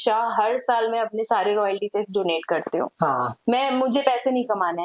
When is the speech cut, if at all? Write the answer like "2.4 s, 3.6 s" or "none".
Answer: none